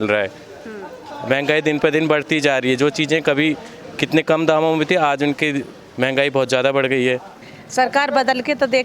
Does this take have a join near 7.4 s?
yes; 1 cut; at 7.4 s

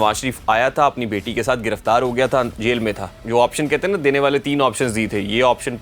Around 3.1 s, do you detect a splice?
yes; 1 cut; at 3.1 s

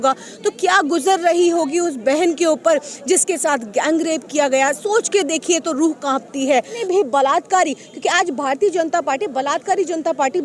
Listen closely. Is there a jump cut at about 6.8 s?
yes; 1 cut; at 6.8 s

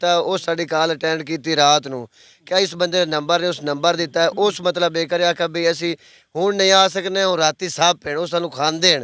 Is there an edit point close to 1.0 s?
no; 0 cuts

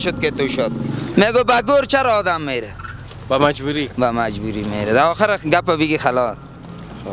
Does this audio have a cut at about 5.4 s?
no; 1 cut; at 1.0 s

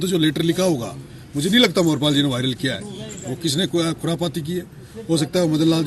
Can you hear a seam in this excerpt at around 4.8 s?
no; 0 cuts

